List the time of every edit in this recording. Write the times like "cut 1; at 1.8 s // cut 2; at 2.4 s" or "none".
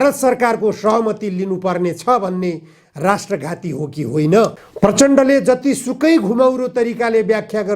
cut 1; at 4.6 s